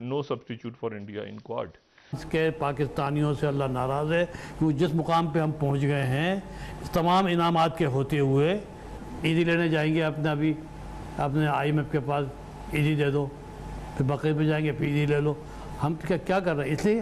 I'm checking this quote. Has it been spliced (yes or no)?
yes